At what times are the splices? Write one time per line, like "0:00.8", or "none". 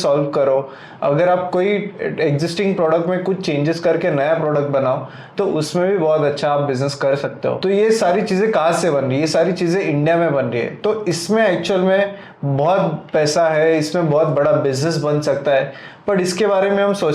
0:07.6